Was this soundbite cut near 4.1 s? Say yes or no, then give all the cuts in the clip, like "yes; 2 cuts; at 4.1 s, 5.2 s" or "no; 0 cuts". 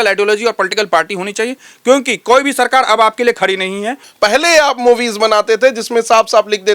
yes; 1 cut; at 4.1 s